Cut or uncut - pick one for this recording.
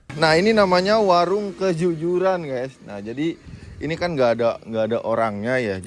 uncut